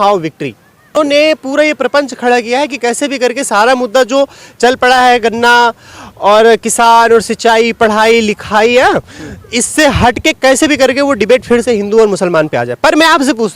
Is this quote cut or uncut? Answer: cut